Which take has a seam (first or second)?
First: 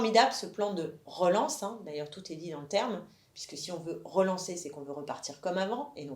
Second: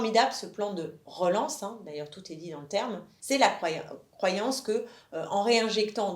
second